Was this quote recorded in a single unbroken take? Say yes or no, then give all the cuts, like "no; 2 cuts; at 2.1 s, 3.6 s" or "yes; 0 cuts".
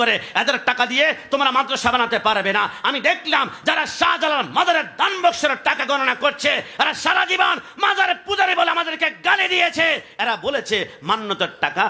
yes; 0 cuts